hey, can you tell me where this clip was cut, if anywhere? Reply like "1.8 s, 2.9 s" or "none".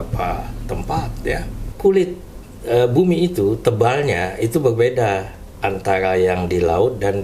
1.7 s